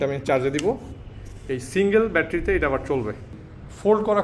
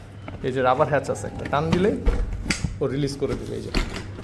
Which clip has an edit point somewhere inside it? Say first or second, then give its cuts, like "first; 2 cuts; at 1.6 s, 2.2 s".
first; 1 cut; at 3.3 s